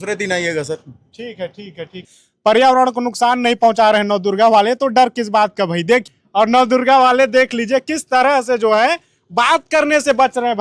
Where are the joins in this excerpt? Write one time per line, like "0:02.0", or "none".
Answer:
none